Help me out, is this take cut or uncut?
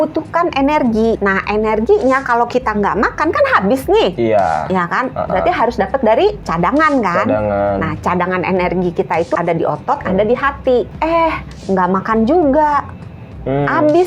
cut